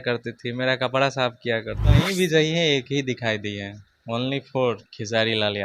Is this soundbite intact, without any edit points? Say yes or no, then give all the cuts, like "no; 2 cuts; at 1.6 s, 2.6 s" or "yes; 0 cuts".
no; 1 cut; at 2.0 s